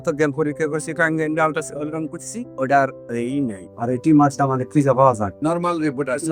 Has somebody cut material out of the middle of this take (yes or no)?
no